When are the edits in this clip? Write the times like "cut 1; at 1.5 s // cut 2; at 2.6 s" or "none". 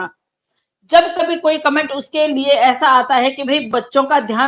none